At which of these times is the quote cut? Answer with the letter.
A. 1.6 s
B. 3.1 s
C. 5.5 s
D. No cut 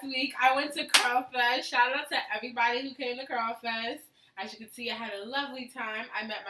C